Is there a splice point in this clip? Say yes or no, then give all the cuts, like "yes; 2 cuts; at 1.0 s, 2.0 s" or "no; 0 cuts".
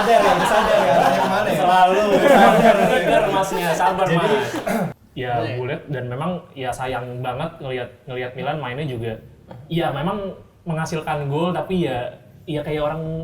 yes; 1 cut; at 4.9 s